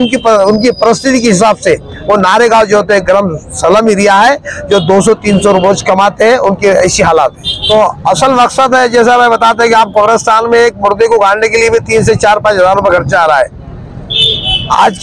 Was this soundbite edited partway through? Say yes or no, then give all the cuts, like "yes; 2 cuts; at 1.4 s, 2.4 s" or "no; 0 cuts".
yes; 1 cut; at 7.5 s